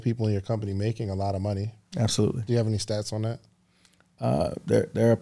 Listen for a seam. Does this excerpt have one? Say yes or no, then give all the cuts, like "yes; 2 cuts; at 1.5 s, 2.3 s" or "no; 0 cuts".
no; 0 cuts